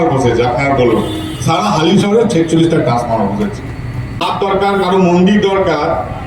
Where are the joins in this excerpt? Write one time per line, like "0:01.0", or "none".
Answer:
0:04.3